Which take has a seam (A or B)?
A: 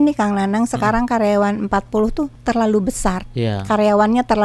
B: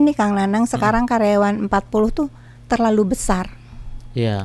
A